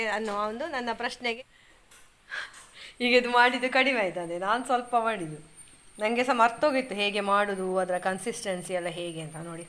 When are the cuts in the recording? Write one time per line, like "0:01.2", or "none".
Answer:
0:01.4

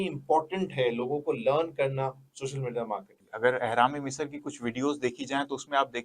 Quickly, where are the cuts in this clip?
0:03.2

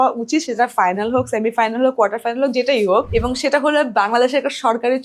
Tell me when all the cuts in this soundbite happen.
0:03.1

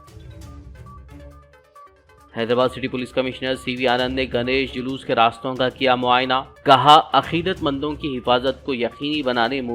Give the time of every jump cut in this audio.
0:01.2

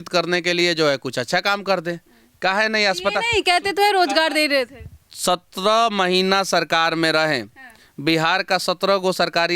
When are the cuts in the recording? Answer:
none

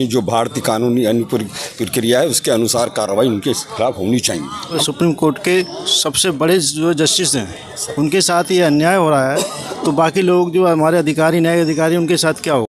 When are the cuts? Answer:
0:04.8

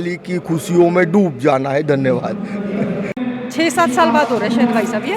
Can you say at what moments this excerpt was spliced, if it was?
0:03.1

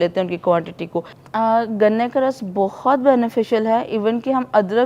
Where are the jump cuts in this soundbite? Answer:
0:01.1

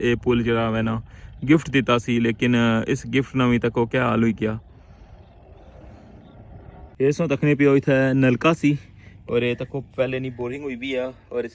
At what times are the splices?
0:06.8

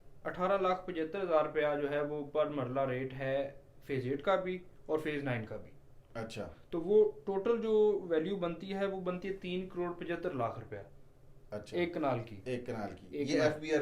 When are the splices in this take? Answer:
none

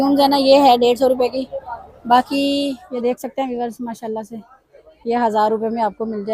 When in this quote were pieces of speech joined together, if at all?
0:02.8

